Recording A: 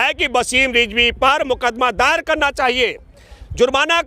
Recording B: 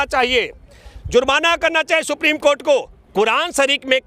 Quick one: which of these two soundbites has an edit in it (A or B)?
B